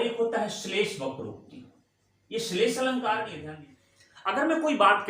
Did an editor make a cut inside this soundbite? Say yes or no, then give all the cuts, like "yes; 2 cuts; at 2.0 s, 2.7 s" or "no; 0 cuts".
yes; 1 cut; at 3.4 s